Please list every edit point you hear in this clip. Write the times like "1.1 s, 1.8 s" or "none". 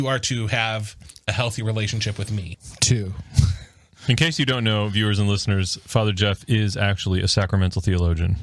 2.5 s